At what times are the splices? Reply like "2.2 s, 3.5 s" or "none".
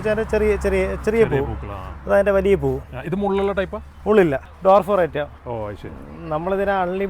4.5 s